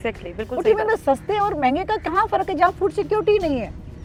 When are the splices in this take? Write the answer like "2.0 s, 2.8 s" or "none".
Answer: none